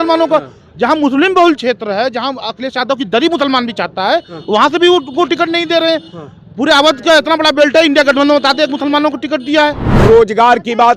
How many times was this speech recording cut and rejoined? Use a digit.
1